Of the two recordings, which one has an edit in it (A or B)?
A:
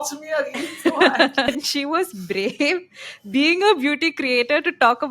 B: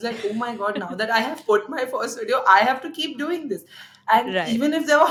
A